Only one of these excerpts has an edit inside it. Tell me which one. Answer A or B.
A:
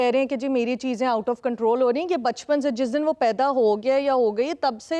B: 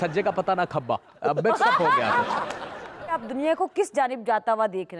B